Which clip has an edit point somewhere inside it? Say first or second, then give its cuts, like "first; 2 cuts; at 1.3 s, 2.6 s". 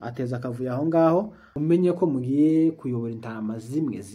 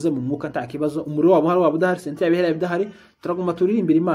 first; 1 cut; at 1.4 s